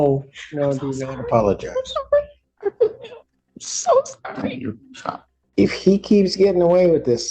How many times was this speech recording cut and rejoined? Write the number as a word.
one